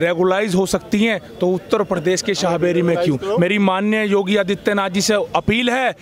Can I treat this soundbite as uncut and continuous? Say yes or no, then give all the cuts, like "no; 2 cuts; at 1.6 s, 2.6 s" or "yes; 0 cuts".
yes; 0 cuts